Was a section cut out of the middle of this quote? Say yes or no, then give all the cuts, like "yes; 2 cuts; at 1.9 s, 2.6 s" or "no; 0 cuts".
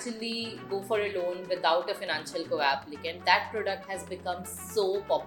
no; 0 cuts